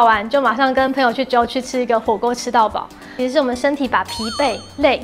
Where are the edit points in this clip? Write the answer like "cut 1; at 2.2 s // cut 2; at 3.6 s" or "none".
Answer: cut 1; at 3.1 s